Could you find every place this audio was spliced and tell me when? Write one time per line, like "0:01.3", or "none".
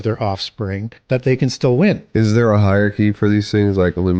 0:00.9
0:02.0